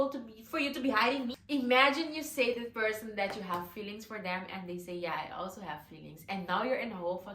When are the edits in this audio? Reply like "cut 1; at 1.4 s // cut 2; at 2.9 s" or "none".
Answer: cut 1; at 1.4 s

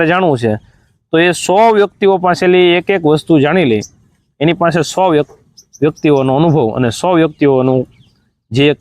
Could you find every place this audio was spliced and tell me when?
none

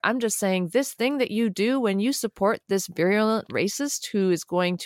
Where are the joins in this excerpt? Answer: none

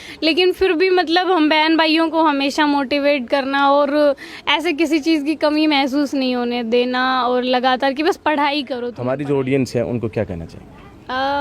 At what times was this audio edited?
cut 1; at 8.9 s

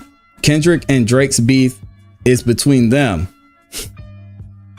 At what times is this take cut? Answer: cut 1; at 3.9 s

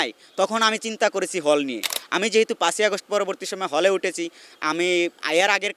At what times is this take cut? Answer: none

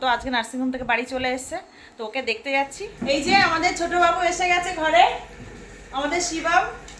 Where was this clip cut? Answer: cut 1; at 2.9 s

